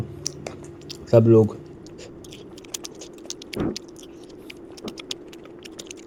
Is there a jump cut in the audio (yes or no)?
no